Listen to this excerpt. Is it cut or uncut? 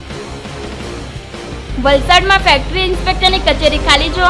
cut